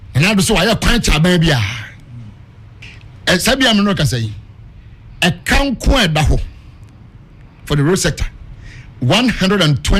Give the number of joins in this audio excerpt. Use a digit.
1